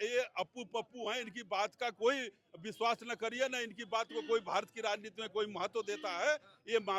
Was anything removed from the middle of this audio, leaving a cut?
no; 0 cuts

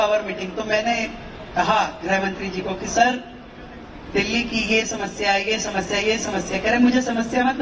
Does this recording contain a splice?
no; 0 cuts

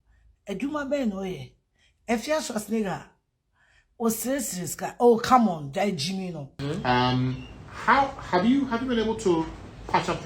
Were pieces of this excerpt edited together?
yes; 1 cut; at 6.5 s

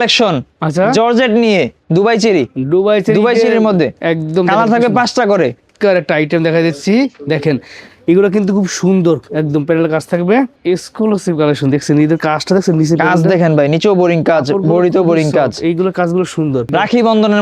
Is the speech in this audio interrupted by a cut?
yes; 4 cuts; at 1.8 s, 5.7 s, 10.6 s, 16.7 s

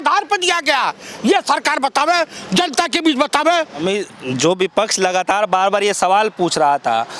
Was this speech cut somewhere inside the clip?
no; 0 cuts

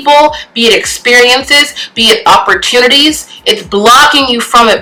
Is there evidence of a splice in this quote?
no; 0 cuts

